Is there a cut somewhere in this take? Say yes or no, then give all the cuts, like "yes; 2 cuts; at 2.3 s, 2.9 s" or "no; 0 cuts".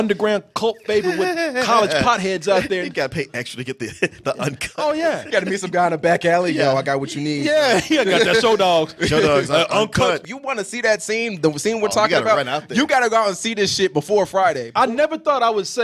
yes; 1 cut; at 14.6 s